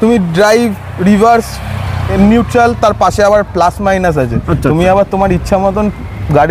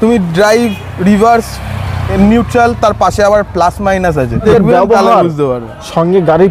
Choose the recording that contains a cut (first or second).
second